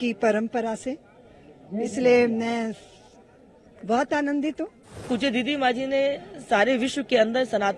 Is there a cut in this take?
yes; 1 cut; at 5.1 s

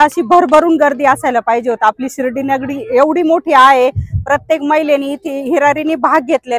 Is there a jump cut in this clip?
no; 0 cuts

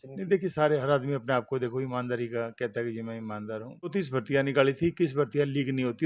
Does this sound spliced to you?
yes; 1 cut; at 3.9 s

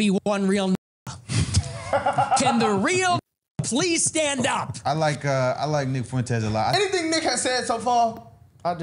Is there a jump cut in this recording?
yes; 2 cuts; at 4.7 s, 6.7 s

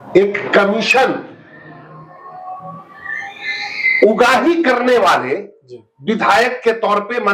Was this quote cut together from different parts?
no; 0 cuts

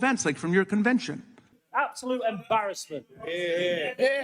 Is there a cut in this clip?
yes; 1 cut; at 1.6 s

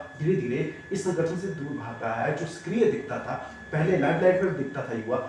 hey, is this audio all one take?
yes; 0 cuts

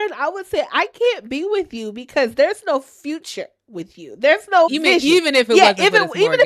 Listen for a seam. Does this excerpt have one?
yes; 1 cut; at 4.7 s

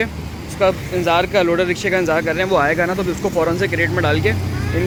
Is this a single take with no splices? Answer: yes; 0 cuts

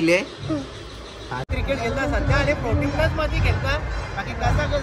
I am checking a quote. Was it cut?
yes; 1 cut; at 1.5 s

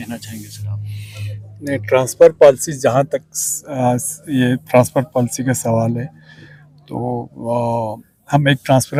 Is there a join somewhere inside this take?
no; 0 cuts

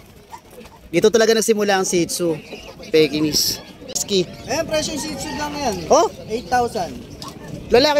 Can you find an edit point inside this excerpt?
yes; 1 cut; at 4.0 s

